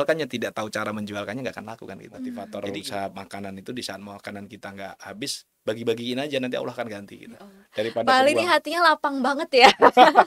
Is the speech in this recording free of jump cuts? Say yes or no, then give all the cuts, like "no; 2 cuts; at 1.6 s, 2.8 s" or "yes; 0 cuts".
no; 1 cut; at 2.4 s